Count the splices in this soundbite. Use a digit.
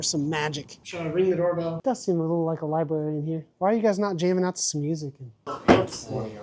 1